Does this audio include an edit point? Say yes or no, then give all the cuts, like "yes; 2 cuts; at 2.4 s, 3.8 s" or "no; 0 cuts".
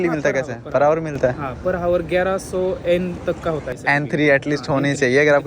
yes; 1 cut; at 3.7 s